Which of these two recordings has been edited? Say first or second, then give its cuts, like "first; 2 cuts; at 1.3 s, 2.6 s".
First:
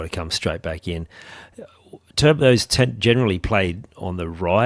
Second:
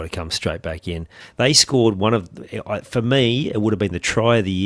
second; 1 cut; at 1.2 s